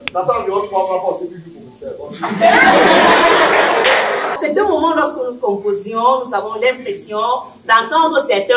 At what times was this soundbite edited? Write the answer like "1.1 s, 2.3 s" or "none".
4.3 s